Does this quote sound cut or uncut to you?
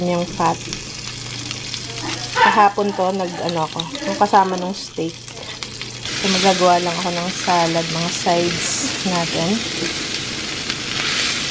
cut